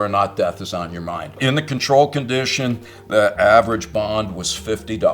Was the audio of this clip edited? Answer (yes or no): yes